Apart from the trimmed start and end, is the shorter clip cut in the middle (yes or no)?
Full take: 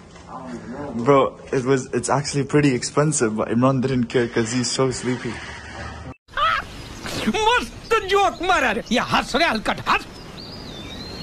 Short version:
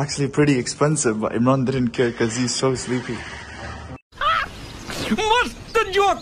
no